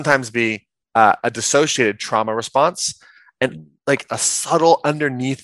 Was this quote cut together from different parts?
no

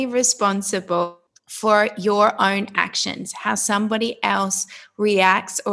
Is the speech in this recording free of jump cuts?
no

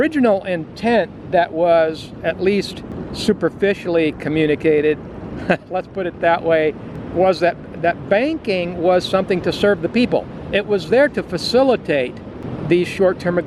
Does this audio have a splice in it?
no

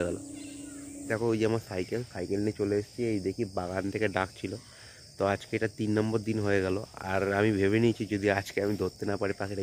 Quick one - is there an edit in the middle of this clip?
yes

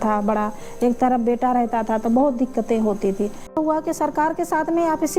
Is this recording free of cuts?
no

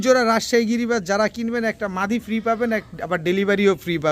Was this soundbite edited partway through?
no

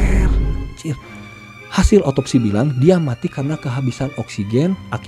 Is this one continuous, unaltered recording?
yes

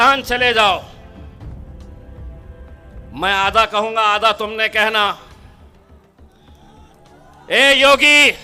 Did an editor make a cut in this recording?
no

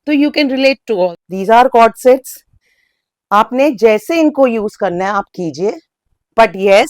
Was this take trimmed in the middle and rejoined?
yes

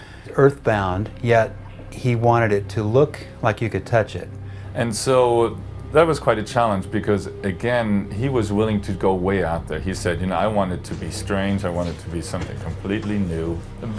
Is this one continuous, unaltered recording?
no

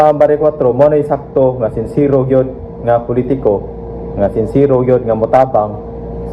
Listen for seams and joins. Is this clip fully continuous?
yes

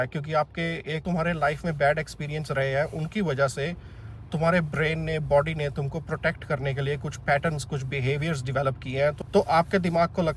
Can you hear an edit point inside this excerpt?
yes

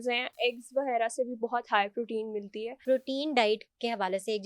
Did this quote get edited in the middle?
yes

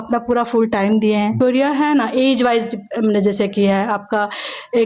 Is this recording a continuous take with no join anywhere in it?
no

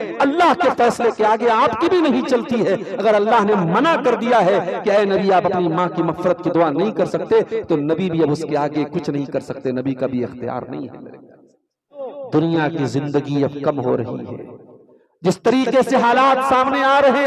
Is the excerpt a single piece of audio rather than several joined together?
no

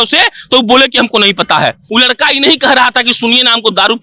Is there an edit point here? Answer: yes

